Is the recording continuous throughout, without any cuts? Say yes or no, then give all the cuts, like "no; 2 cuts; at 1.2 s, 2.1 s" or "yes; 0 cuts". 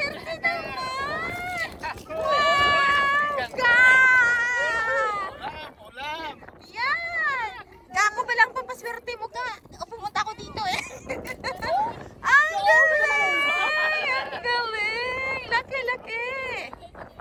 yes; 0 cuts